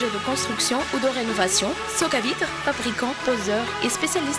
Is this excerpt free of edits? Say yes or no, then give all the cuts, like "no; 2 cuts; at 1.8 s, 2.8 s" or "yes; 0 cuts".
yes; 0 cuts